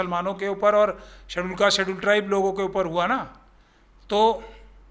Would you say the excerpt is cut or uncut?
uncut